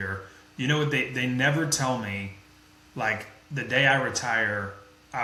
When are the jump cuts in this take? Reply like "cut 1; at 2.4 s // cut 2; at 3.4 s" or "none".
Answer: none